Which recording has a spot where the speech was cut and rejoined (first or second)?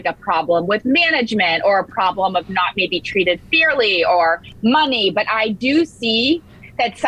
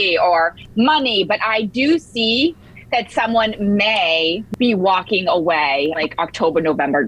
second